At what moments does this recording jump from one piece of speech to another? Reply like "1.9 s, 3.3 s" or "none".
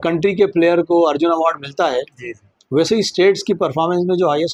none